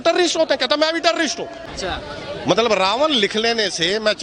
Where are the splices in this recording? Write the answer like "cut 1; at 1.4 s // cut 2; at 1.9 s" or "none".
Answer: cut 1; at 1.6 s